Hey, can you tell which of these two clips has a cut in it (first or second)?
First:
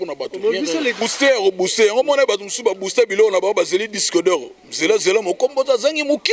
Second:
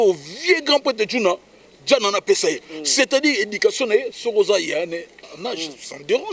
first